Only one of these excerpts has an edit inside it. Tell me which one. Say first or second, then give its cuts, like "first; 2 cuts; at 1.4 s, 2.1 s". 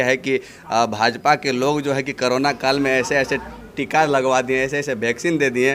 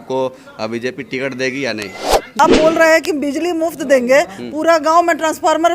second; 1 cut; at 2.4 s